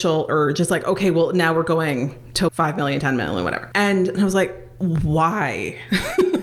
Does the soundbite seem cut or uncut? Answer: cut